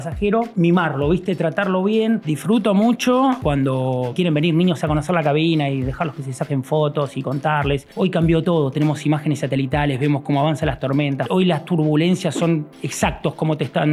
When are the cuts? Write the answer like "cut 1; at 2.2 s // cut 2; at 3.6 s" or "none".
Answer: cut 1; at 2.2 s // cut 2; at 4.0 s // cut 3; at 7.9 s // cut 4; at 11.2 s